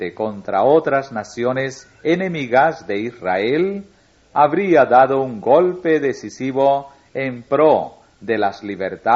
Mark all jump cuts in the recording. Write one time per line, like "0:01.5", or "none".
0:07.5